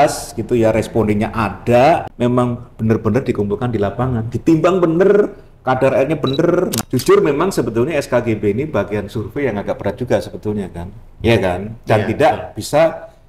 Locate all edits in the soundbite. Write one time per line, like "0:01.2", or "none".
0:02.1
0:06.8